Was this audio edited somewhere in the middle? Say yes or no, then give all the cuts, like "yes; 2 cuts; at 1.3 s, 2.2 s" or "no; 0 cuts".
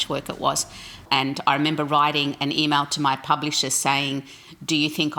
yes; 1 cut; at 1.0 s